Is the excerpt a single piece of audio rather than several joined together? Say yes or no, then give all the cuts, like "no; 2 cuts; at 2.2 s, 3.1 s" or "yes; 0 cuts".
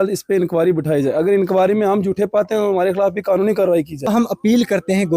no; 1 cut; at 4.1 s